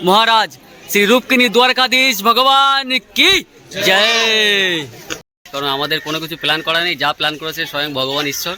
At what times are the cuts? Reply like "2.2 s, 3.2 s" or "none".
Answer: 5.5 s